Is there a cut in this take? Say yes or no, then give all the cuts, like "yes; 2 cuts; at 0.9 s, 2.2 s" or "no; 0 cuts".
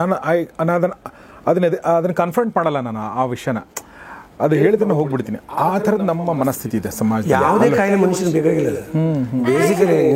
no; 0 cuts